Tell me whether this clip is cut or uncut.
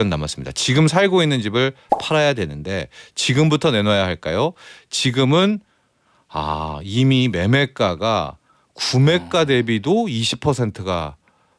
uncut